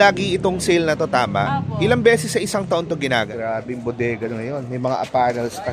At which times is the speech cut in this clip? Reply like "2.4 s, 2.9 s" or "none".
3.3 s